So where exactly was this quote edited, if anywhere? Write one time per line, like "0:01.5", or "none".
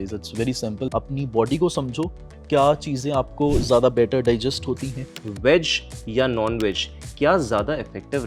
0:00.9
0:05.2